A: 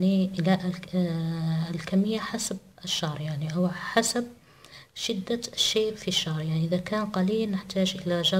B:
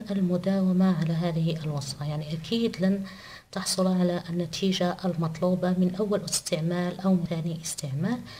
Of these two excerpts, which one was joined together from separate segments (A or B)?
B